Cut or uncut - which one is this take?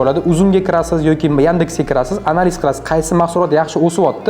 uncut